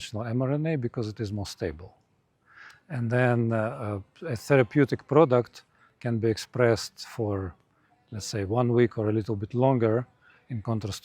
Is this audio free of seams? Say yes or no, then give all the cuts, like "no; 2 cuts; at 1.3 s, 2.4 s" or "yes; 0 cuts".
yes; 0 cuts